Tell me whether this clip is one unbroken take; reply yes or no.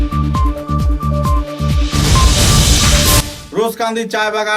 no